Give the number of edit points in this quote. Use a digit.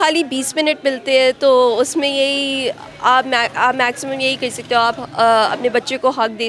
0